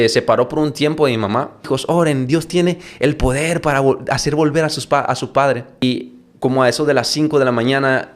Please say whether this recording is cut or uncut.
cut